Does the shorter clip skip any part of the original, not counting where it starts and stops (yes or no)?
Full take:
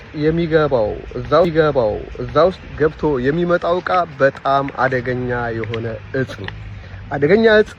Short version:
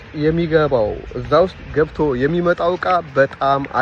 yes